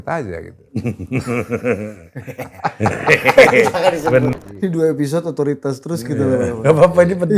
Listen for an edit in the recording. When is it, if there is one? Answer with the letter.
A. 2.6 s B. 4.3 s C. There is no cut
B